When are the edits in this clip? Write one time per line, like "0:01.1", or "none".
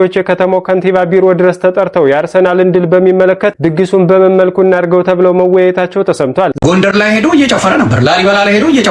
0:06.5